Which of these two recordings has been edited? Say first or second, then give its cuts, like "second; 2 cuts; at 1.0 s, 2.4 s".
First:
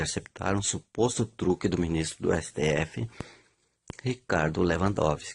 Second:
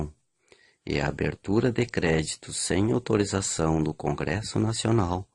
second; 1 cut; at 2.9 s